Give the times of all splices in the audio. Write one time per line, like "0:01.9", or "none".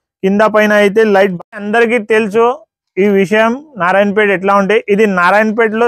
0:01.3

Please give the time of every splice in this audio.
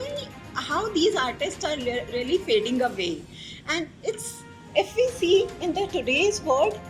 0:04.7

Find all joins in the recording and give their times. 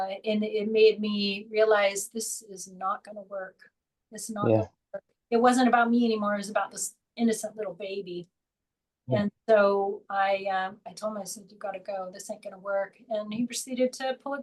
none

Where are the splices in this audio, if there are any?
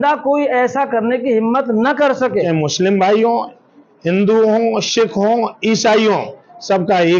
0:02.4

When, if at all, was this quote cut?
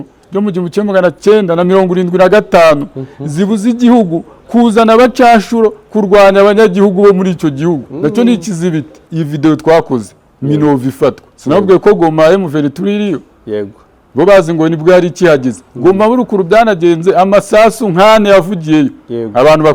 0:09.0

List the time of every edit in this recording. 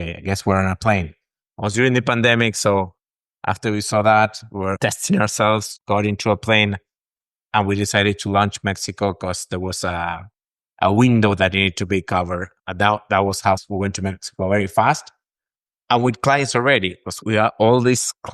0:04.8
0:05.7

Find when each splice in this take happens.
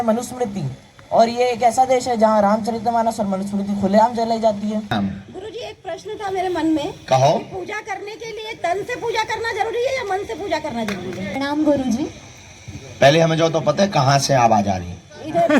0:04.9
0:11.4

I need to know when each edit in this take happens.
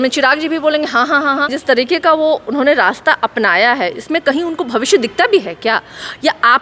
0:01.6

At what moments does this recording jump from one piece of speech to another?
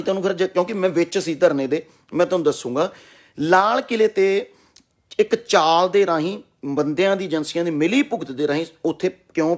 none

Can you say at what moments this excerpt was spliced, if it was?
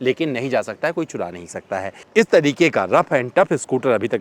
0:02.0

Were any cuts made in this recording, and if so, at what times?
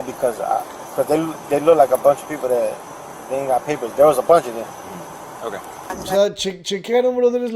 0:05.8

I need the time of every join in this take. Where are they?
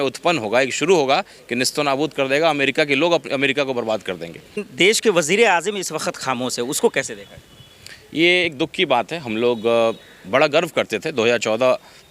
0:04.6

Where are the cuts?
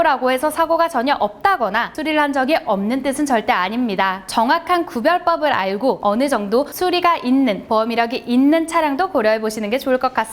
0:01.9
0:04.2
0:06.0

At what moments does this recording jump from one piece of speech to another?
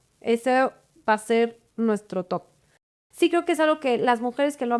0:03.0

